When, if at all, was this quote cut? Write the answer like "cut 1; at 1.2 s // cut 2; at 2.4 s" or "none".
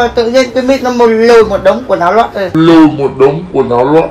none